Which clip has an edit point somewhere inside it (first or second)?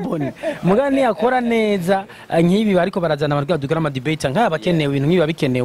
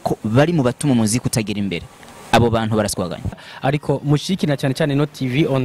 second